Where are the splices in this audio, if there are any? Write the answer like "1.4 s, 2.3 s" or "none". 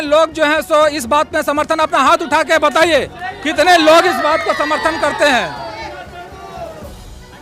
none